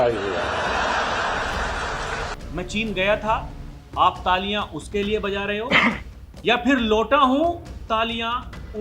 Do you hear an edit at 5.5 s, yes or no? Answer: no